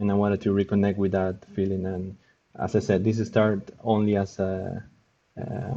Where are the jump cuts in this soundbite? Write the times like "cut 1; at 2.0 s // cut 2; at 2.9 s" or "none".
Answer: none